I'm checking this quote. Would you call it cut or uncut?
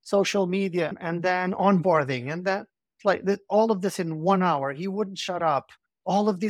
uncut